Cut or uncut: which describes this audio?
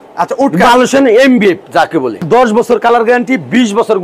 cut